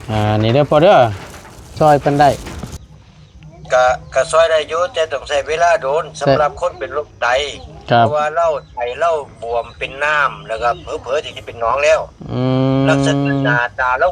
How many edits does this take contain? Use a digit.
1